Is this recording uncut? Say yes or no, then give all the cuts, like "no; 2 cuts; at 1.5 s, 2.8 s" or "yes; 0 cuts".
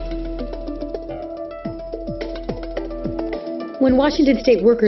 no; 1 cut; at 1.8 s